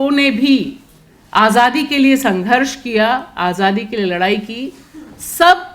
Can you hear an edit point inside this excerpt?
no; 0 cuts

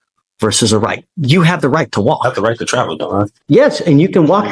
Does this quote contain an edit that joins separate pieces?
yes; 1 cut; at 3.3 s

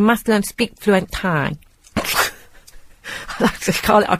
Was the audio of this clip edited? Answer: yes; 1 cut; at 1.7 s

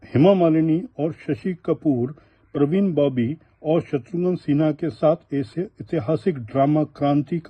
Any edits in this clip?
no; 0 cuts

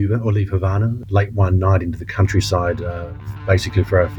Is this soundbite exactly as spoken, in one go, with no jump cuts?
no; 1 cut; at 1.0 s

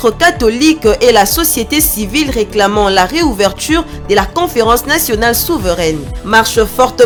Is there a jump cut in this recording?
no; 0 cuts

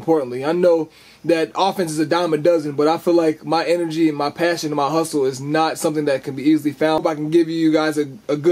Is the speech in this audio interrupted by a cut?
yes; 1 cut; at 7.0 s

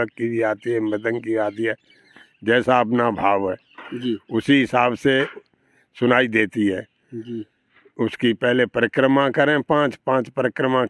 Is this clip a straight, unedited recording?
yes; 0 cuts

